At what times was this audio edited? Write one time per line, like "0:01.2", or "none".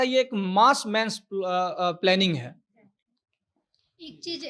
none